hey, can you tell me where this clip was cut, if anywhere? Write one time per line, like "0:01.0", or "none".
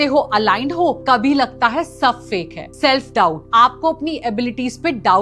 none